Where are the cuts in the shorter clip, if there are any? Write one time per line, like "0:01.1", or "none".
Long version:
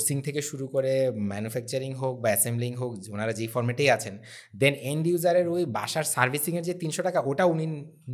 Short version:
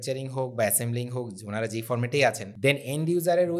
0:02.5